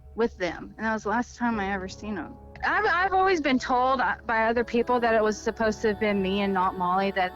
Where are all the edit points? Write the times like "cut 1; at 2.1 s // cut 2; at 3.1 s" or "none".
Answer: cut 1; at 2.6 s